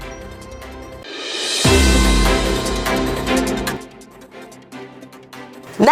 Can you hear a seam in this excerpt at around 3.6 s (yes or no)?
yes